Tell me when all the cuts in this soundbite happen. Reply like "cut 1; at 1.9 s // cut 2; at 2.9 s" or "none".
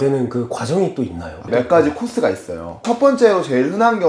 cut 1; at 1.5 s